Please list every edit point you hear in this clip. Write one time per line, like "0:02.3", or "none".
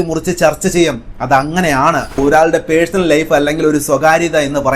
0:02.2

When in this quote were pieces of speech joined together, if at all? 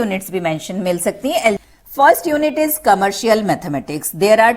0:01.6

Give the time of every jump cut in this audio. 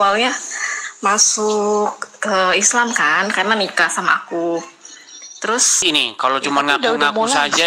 0:05.8

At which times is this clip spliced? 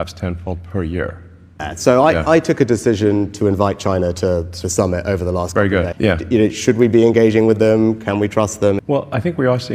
0:01.7
0:05.9
0:08.8

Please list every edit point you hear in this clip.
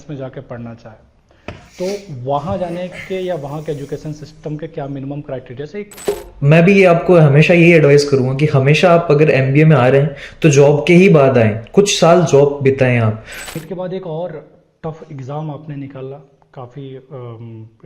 0:06.1
0:13.5

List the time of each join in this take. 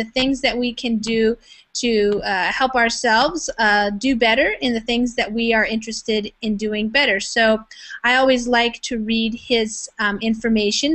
0:03.4

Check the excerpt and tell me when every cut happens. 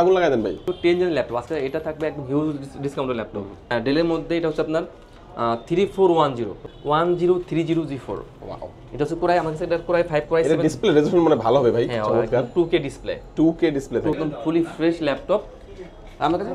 0:00.7
0:03.7
0:06.7
0:14.2

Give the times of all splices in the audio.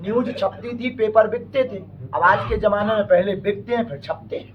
none

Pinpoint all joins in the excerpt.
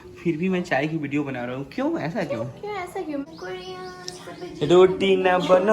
0:03.2

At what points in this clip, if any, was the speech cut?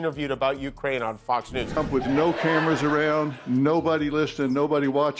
0:01.8

